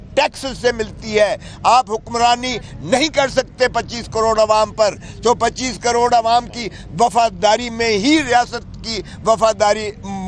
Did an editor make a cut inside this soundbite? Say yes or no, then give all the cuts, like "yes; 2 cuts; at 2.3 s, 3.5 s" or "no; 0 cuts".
no; 0 cuts